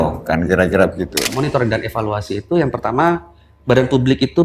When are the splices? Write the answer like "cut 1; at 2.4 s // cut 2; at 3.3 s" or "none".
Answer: cut 1; at 1.4 s